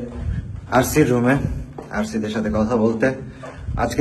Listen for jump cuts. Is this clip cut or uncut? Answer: uncut